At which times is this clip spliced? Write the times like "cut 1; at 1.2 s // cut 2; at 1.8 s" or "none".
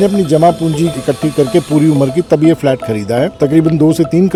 none